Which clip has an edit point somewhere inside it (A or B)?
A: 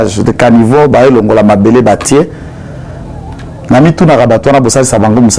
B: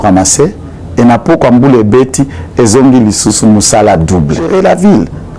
B